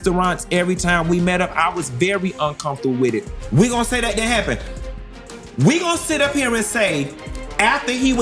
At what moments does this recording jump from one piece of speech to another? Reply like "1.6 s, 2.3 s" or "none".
3.3 s